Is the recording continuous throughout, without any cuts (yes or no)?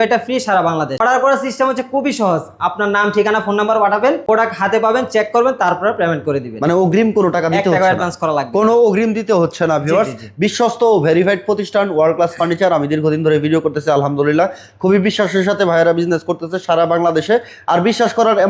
no